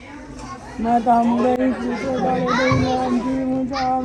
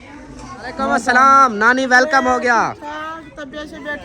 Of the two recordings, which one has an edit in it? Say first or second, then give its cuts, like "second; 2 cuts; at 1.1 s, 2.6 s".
second; 1 cut; at 1.0 s